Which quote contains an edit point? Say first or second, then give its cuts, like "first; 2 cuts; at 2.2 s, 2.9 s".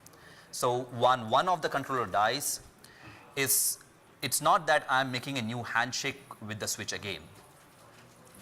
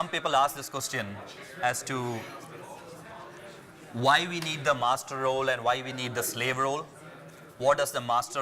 first; 1 cut; at 1.0 s